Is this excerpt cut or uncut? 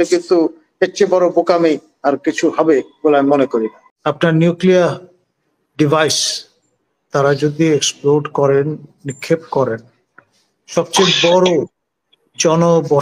cut